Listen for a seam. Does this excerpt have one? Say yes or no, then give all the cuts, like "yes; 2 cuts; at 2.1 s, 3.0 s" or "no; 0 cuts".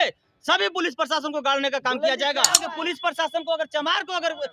yes; 1 cut; at 2.6 s